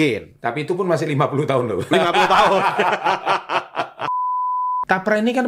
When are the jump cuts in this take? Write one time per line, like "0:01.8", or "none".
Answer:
0:04.5